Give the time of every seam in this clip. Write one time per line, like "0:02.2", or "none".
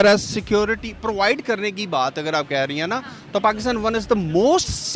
none